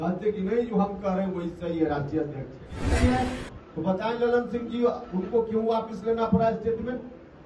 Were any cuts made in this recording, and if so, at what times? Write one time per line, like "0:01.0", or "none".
0:02.8